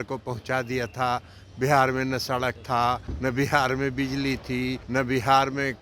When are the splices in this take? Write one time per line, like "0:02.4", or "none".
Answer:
0:03.1
0:04.8